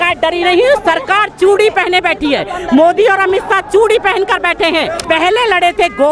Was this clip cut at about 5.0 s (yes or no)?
yes